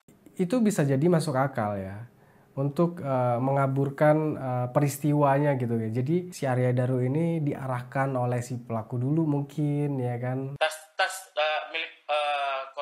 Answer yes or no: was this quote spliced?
yes